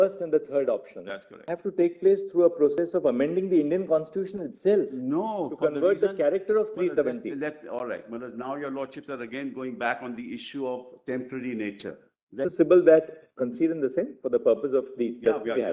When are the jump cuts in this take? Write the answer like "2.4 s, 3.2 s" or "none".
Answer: 1.5 s, 12.5 s